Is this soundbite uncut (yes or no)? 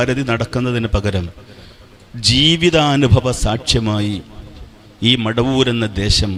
yes